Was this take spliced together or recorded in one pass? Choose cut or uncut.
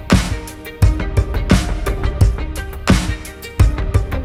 uncut